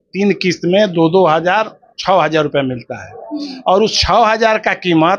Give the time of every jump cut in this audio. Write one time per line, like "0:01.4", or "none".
none